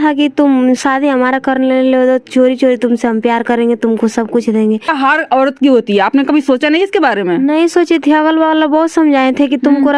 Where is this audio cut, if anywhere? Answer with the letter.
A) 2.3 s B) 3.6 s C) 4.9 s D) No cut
C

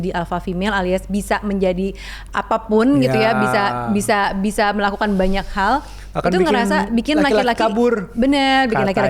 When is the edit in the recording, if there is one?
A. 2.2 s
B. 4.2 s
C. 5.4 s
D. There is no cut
D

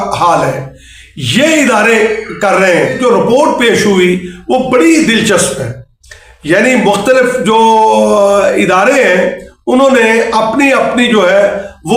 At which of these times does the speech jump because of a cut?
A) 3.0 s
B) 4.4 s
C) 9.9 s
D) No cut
A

